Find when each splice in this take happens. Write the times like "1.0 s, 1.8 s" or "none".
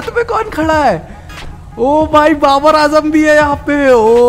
none